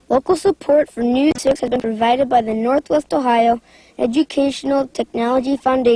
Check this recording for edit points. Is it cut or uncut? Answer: cut